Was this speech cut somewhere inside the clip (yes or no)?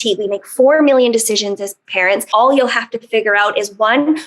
yes